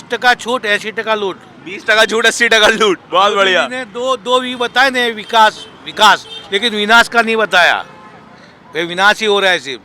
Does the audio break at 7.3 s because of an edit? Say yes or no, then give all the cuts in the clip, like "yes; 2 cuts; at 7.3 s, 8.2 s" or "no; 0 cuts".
no; 0 cuts